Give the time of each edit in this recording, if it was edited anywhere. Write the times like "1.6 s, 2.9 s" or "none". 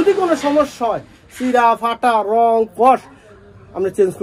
none